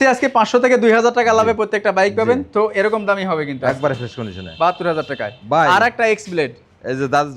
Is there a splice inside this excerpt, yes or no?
no